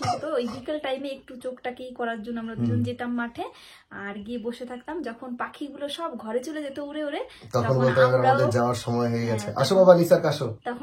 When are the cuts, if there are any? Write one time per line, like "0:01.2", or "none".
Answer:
none